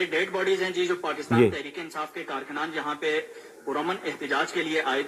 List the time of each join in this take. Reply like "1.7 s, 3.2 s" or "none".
none